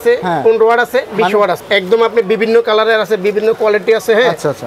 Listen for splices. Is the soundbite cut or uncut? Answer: cut